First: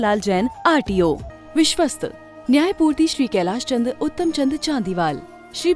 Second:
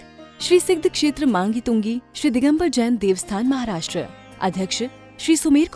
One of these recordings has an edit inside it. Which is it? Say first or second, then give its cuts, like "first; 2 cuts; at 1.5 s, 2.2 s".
first; 1 cut; at 1.3 s